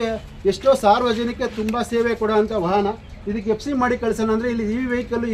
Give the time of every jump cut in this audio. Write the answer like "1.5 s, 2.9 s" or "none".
none